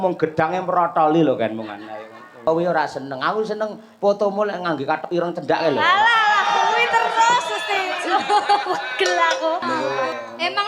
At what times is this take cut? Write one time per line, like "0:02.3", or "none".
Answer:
0:02.5
0:09.6